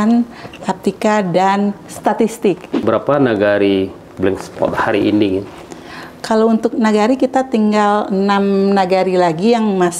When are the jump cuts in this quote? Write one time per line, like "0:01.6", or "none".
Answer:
0:02.7